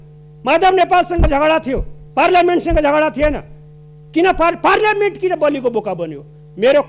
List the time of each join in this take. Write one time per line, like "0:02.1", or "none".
none